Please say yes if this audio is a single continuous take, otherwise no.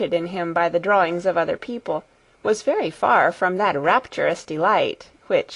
yes